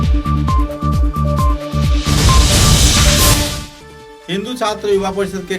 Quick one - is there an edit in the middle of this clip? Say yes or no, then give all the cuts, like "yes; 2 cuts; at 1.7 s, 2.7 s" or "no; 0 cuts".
yes; 1 cut; at 3.5 s